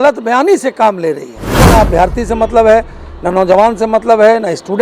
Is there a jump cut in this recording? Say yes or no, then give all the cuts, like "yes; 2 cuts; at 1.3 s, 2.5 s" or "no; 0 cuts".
yes; 1 cut; at 1.5 s